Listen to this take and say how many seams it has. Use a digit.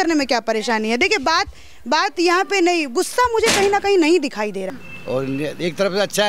1